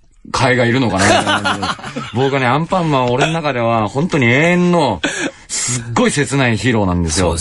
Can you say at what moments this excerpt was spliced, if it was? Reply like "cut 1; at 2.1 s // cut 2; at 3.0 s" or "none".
cut 1; at 5.5 s